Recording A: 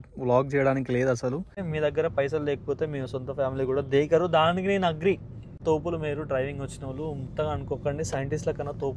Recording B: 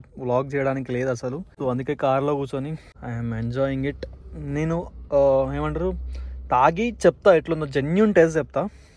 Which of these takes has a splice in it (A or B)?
A